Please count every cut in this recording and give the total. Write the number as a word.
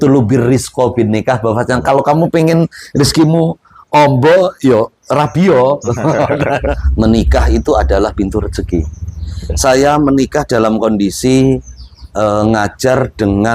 one